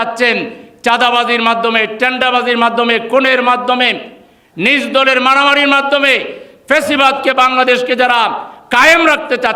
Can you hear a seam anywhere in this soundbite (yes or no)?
no